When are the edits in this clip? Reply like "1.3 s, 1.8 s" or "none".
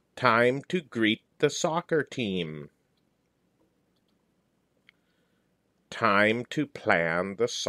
4.0 s